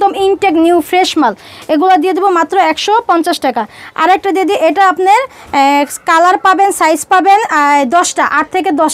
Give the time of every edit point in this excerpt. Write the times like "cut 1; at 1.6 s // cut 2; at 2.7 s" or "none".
none